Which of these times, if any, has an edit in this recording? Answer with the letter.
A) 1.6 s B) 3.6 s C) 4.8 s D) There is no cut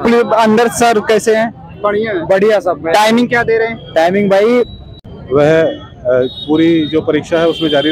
C